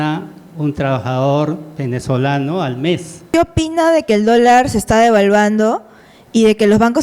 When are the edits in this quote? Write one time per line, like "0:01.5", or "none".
0:03.2